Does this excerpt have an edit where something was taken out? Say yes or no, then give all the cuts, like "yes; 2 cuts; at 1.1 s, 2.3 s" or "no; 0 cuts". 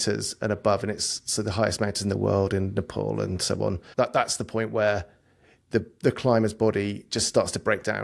yes; 1 cut; at 3.8 s